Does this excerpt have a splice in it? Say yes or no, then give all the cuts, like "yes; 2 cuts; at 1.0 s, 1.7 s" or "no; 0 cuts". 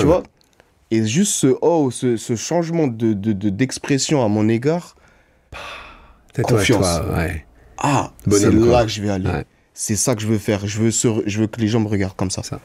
no; 0 cuts